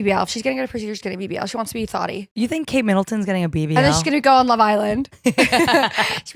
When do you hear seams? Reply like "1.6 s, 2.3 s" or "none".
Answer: 2.3 s, 5.1 s

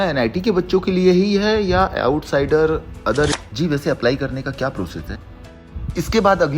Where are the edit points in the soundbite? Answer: 3.4 s, 5.6 s

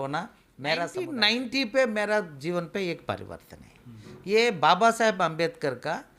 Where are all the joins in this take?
1.0 s

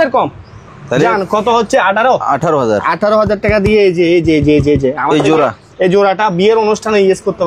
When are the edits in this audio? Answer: none

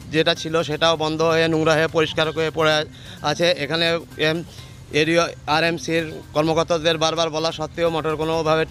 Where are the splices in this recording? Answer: none

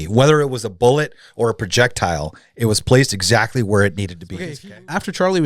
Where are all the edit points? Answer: 4.2 s

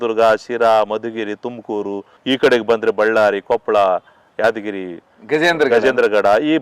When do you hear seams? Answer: 2.1 s

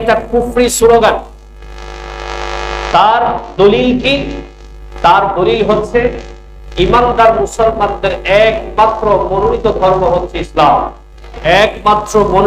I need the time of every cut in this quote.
11.3 s

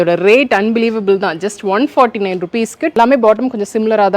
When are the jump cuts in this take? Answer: 2.9 s

